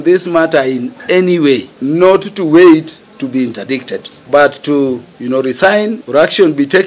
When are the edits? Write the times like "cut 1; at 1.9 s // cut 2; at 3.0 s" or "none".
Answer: cut 1; at 1.7 s // cut 2; at 4.1 s // cut 3; at 5.1 s // cut 4; at 6.0 s